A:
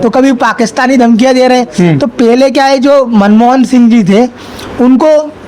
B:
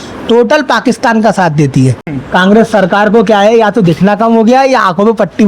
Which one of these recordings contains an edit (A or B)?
B